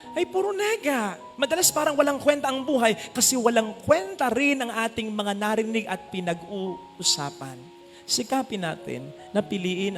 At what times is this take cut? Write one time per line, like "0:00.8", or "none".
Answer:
none